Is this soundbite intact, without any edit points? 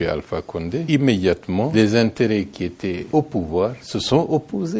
no; 4 cuts; at 0.8 s, 1.4 s, 3.0 s, 3.9 s

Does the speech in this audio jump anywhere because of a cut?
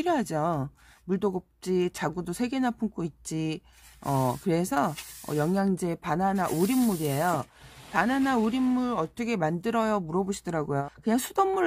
no; 0 cuts

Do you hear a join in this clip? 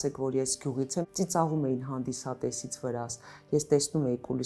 yes; 1 cut; at 1.0 s

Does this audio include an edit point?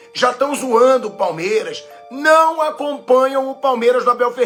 no; 0 cuts

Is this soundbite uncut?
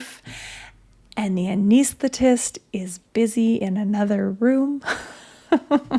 yes; 0 cuts

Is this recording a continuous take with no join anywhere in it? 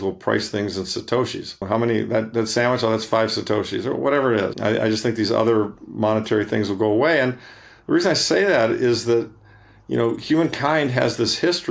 no; 2 cuts; at 1.6 s, 4.6 s

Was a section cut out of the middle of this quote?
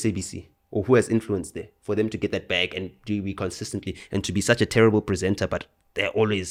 no; 0 cuts

